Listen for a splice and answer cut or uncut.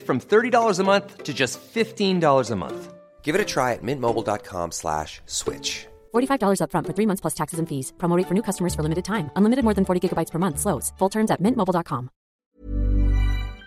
cut